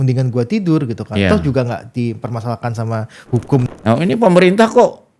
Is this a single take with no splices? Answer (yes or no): no